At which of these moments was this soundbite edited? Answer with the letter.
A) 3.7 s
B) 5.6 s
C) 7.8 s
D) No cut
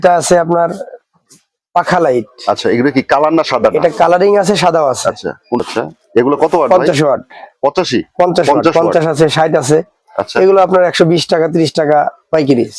B